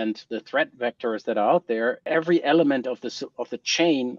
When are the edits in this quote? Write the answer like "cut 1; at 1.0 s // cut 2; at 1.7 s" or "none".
cut 1; at 2.0 s